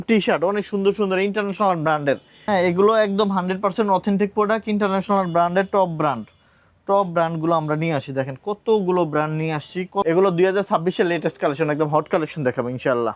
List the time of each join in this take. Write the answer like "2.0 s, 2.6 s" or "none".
2.3 s, 10.0 s

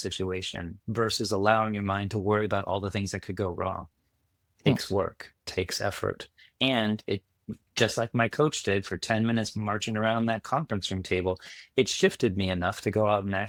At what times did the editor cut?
none

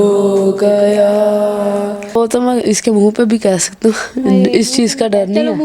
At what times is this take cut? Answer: 2.2 s

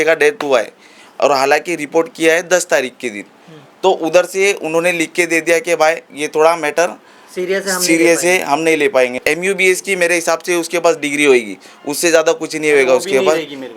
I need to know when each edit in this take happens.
9.1 s

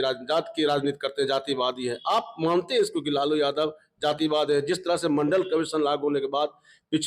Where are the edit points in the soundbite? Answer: none

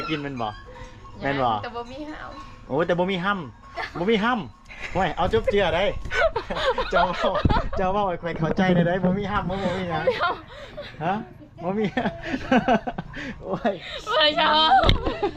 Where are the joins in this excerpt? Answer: none

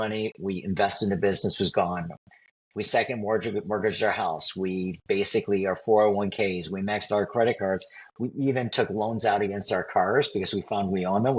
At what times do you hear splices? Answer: none

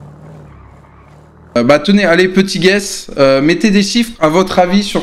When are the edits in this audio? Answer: 1.6 s

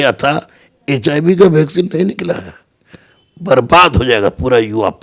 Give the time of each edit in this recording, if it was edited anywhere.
none

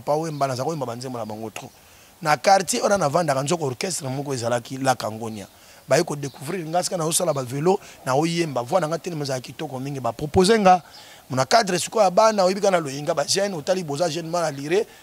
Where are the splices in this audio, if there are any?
none

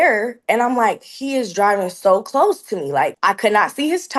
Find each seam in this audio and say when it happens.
3.1 s

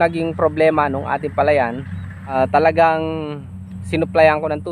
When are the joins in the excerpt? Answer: 1.9 s

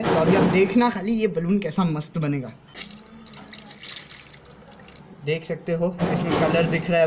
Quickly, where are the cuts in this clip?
2.8 s, 5.0 s

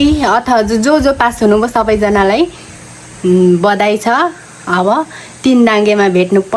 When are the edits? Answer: none

